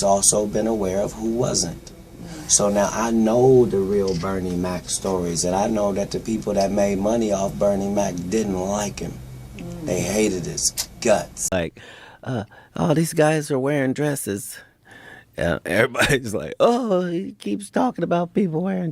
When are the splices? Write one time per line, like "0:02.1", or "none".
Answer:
0:11.3